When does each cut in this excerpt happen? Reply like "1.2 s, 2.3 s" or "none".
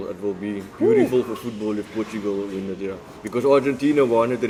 none

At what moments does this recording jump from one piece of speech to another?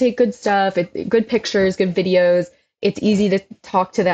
none

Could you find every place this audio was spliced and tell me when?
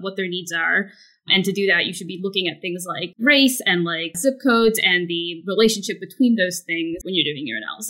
3.1 s, 4.1 s, 7.0 s

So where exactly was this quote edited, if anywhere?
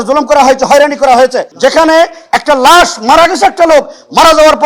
1.5 s

